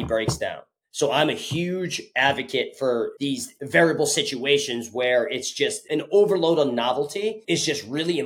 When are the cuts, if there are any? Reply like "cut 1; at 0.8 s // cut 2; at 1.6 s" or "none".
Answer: cut 1; at 3.1 s // cut 2; at 7.4 s